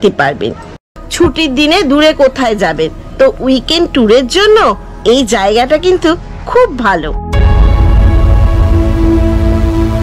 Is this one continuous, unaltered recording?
no; 1 cut; at 1.0 s

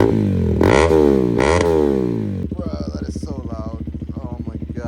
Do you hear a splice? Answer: yes; 1 cut; at 2.4 s

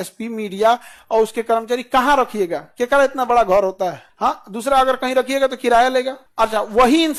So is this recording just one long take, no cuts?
yes; 0 cuts

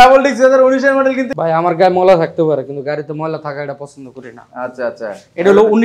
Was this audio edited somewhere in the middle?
yes; 1 cut; at 1.2 s

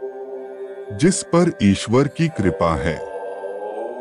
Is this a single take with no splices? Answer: no; 2 cuts; at 0.9 s, 3.0 s

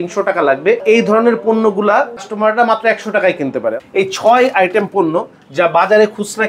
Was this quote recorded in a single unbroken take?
no; 3 cuts; at 0.8 s, 2.3 s, 3.8 s

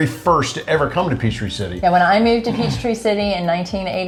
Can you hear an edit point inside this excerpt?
no; 0 cuts

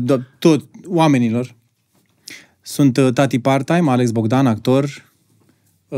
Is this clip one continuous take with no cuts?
yes; 0 cuts

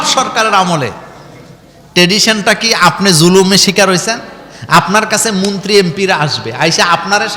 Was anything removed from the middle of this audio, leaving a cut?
no; 0 cuts

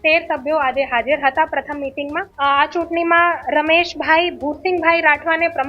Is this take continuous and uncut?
no; 1 cut; at 2.3 s

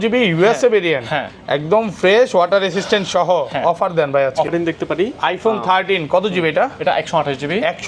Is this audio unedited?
no; 1 cut; at 4.5 s

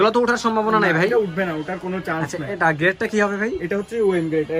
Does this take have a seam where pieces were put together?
no; 0 cuts

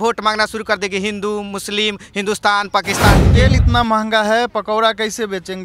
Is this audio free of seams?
no; 1 cut; at 3.3 s

